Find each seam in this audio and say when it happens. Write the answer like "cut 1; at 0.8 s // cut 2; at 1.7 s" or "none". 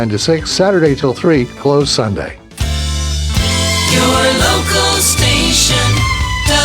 cut 1; at 2.8 s